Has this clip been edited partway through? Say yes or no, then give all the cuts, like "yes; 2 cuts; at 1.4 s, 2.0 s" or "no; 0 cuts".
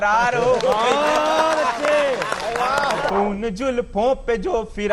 yes; 1 cut; at 3.1 s